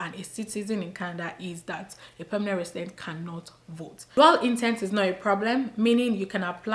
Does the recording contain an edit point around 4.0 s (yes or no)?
yes